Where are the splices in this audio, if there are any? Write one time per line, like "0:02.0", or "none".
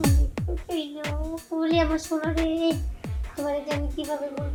none